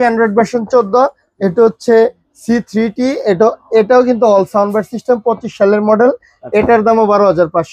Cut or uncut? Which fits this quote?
uncut